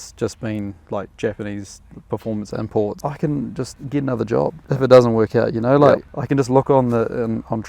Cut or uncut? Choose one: cut